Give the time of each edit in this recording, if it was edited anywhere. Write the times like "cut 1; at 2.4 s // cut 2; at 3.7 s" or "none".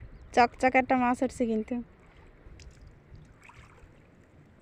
none

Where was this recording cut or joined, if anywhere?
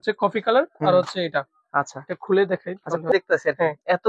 cut 1; at 3.1 s

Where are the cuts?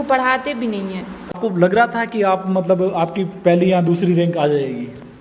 cut 1; at 1.4 s

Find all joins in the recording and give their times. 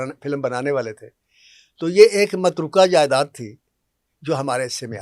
none

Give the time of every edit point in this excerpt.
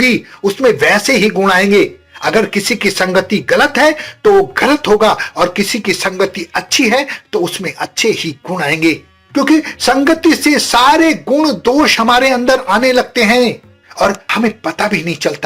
none

